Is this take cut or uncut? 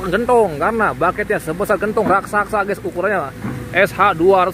uncut